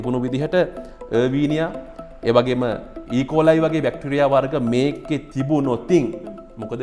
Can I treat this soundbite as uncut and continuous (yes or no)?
yes